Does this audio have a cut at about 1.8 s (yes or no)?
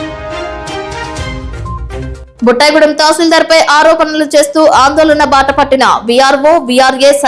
yes